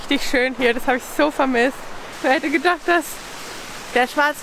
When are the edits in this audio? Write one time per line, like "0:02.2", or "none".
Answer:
0:02.1